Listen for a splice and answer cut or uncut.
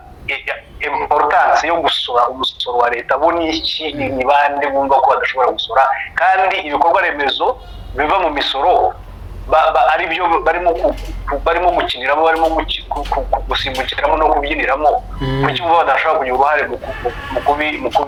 uncut